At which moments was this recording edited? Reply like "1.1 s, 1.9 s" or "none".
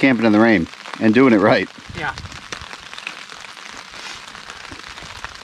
none